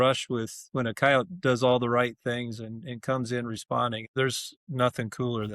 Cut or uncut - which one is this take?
cut